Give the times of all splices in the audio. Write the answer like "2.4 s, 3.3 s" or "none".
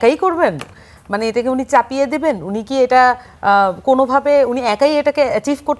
none